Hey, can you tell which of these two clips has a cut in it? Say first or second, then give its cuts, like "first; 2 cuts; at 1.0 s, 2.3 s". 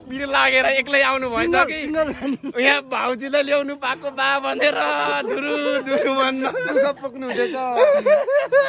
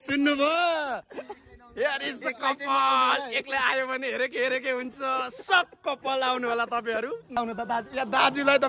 second; 1 cut; at 7.4 s